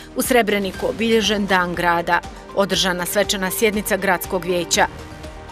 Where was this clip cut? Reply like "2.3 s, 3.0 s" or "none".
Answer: none